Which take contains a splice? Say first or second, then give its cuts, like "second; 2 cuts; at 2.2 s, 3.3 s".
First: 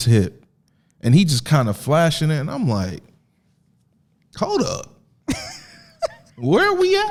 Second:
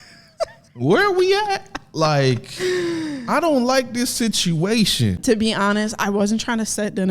second; 1 cut; at 5.2 s